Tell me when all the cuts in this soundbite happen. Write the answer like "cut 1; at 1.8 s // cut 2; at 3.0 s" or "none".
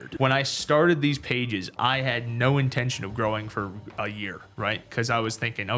cut 1; at 4.4 s